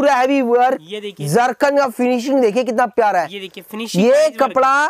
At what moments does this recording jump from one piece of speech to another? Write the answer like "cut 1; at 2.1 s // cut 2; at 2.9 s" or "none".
none